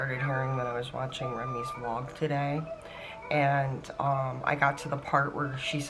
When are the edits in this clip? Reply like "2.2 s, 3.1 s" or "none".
none